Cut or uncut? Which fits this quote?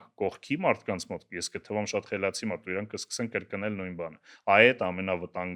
uncut